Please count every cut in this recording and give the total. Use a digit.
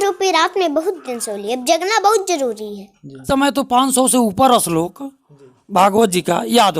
1